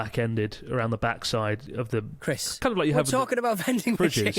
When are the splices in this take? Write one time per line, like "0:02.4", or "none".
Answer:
0:03.1